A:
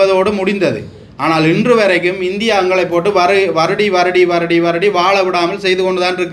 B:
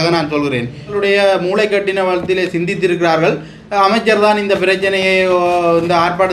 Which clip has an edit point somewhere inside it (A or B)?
B